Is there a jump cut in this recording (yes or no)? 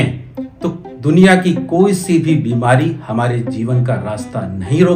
no